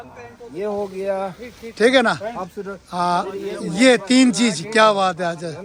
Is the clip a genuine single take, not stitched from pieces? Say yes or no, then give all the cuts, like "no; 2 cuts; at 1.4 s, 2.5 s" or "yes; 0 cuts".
yes; 0 cuts